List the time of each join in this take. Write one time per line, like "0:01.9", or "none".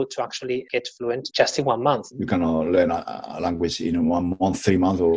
0:01.1
0:02.1

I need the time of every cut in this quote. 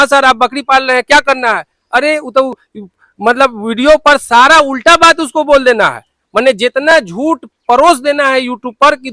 none

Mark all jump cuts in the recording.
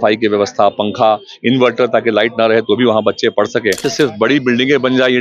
0:03.8

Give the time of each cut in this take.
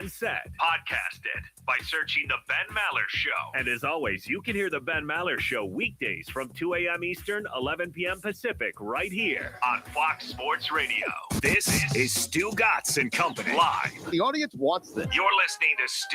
0:11.2

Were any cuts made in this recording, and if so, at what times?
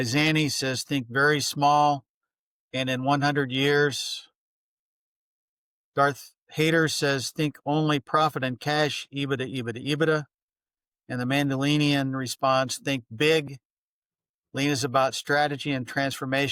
none

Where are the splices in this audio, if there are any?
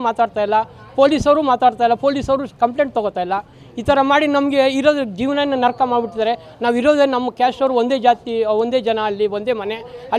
none

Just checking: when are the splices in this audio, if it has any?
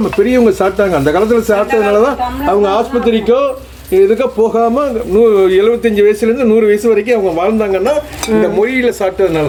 none

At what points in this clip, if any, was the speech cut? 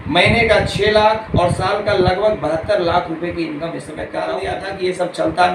0:04.5

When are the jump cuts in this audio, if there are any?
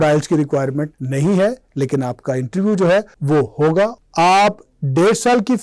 0:01.0
0:03.2
0:03.9

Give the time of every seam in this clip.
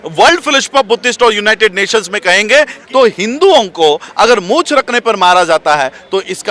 0:02.8

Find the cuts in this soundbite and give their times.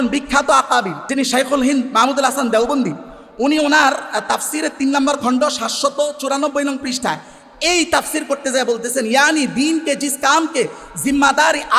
0:01.0

